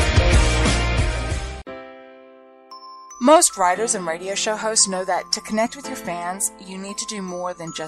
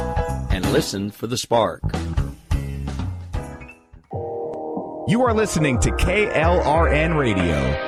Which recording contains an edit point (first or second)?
first